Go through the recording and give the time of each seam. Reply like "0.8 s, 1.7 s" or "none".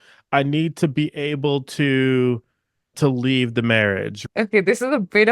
2.9 s, 4.1 s